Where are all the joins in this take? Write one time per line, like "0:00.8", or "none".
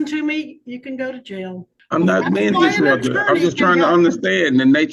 0:01.7